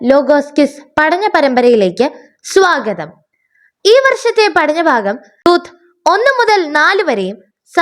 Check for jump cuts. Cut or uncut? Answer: cut